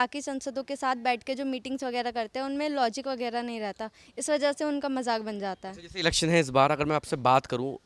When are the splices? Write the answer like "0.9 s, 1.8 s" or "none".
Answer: none